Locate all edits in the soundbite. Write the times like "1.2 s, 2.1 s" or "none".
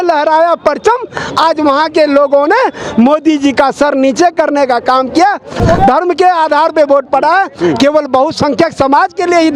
5.6 s